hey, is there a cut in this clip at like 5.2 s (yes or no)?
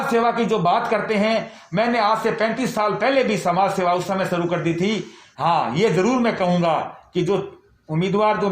yes